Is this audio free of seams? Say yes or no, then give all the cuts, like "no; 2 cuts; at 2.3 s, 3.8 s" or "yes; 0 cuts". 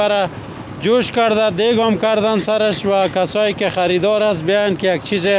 yes; 0 cuts